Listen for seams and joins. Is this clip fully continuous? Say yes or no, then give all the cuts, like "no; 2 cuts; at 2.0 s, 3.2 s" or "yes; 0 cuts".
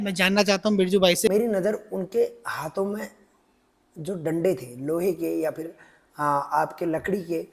no; 1 cut; at 1.3 s